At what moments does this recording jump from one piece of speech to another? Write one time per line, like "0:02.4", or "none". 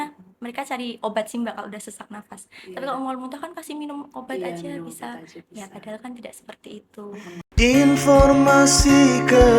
0:07.4